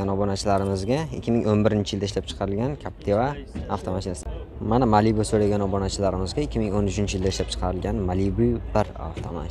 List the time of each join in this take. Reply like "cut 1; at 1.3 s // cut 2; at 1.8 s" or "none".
cut 1; at 4.1 s